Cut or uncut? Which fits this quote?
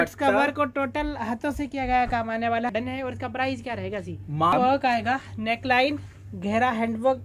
cut